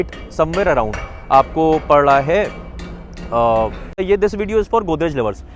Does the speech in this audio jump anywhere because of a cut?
yes; 1 cut; at 4.0 s

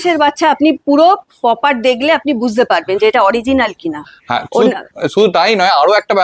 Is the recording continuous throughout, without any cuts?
yes; 0 cuts

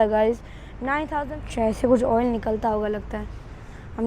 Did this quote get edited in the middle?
yes; 1 cut; at 1.0 s

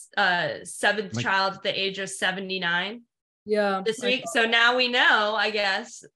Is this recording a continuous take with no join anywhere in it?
yes; 0 cuts

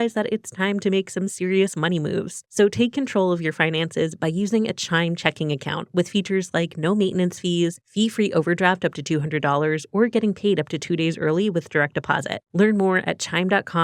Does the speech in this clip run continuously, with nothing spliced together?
yes; 0 cuts

